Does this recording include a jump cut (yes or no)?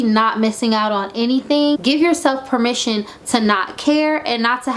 yes